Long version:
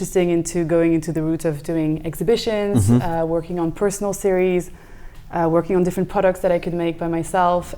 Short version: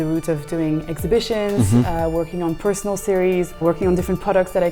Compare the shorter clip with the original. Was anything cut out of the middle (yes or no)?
yes